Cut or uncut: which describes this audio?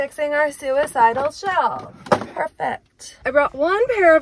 cut